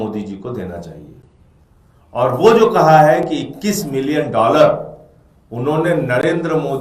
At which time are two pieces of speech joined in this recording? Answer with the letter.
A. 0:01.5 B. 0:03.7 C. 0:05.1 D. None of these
D